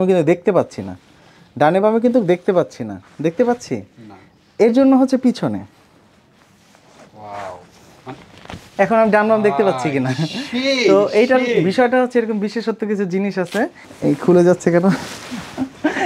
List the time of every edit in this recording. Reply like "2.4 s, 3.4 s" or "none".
13.9 s